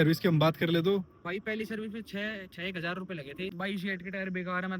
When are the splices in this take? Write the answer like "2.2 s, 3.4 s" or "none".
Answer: 3.5 s